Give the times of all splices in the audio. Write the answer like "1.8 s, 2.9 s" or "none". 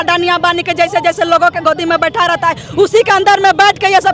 none

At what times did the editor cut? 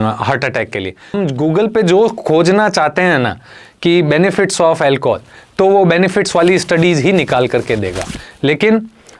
1.1 s

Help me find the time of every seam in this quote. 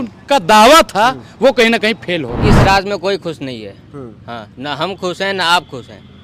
2.3 s

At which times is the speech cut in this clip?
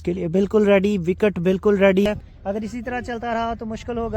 2.0 s

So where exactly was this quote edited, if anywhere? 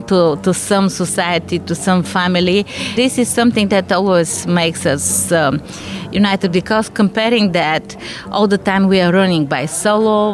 3.0 s

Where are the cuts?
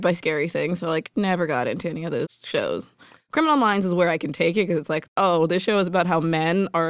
2.4 s, 3.2 s, 5.1 s

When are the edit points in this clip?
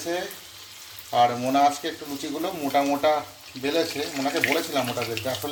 none

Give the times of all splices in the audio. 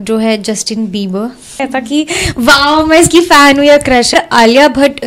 1.6 s, 4.1 s

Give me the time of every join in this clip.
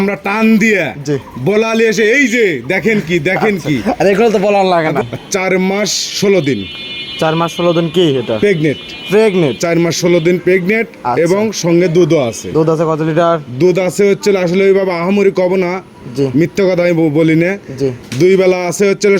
5.0 s

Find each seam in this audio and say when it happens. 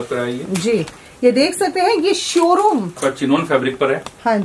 2.9 s

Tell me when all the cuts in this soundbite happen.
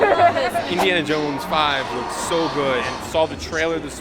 0.7 s, 3.0 s

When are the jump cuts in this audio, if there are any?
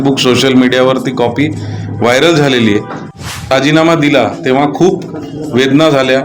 3.1 s

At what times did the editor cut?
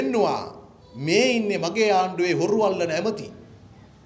none

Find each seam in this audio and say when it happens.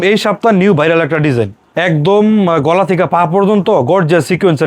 1.6 s

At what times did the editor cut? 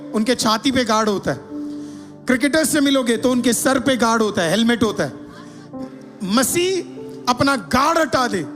5.8 s

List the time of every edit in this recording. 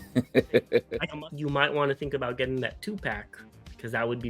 0.9 s

